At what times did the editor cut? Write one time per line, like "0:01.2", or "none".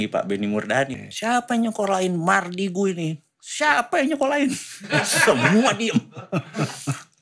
0:01.0